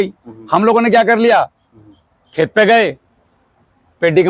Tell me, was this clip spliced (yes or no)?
no